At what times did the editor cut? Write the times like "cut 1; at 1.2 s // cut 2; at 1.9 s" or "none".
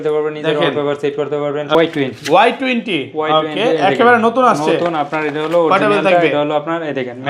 cut 1; at 1.7 s

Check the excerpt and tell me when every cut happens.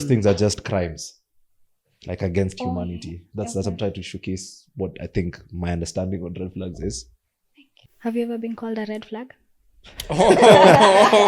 cut 1; at 7.8 s

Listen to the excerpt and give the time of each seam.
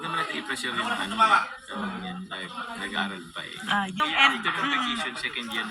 cut 1; at 4.0 s

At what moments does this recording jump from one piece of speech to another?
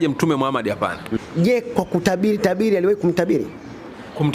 cut 1; at 1.5 s

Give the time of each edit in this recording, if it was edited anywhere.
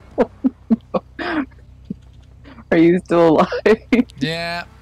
none

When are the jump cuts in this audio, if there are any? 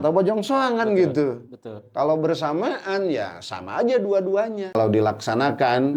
cut 1; at 4.8 s

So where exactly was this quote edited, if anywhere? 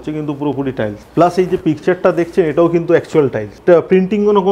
cut 1; at 1.0 s // cut 2; at 3.5 s

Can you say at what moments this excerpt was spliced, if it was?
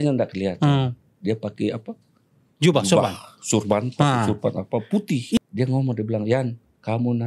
cut 1; at 5.4 s

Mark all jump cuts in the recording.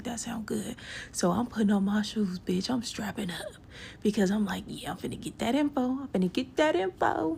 cut 1; at 6.3 s

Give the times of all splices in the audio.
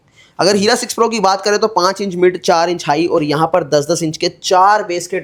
none

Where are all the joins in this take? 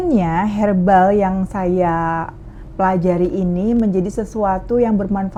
none

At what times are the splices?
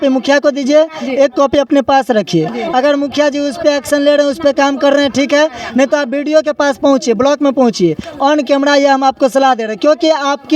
none

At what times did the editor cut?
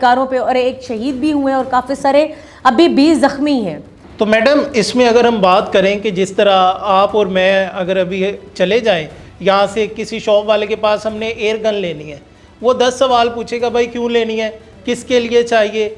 none

